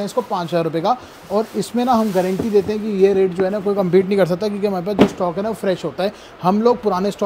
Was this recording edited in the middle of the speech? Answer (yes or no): no